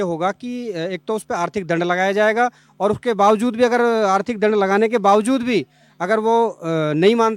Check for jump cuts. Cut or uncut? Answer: uncut